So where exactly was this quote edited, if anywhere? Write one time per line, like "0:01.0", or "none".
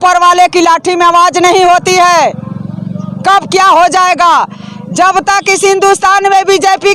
none